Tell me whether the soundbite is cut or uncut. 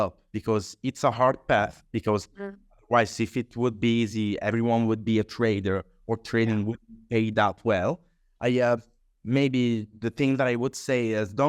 uncut